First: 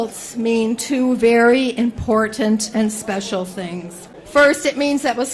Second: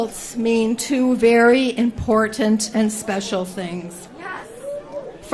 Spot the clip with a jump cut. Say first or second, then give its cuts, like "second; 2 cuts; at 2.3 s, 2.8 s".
first; 1 cut; at 4.2 s